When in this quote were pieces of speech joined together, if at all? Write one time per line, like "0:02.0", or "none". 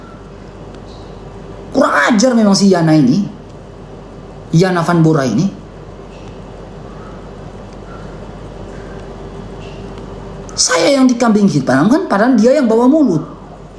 none